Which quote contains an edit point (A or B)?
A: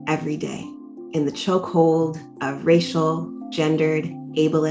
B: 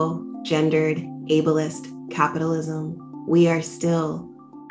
A